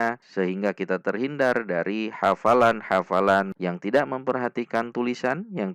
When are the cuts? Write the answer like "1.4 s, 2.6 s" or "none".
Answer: 3.5 s